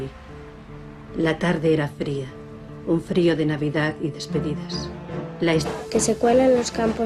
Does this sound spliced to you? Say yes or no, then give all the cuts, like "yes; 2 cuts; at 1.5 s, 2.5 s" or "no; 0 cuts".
no; 0 cuts